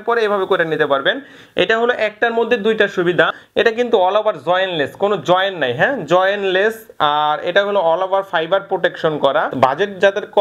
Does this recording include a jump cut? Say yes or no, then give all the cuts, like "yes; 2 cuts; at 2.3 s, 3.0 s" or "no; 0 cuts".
yes; 2 cuts; at 3.4 s, 9.5 s